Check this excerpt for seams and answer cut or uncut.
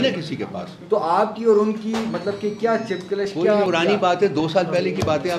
cut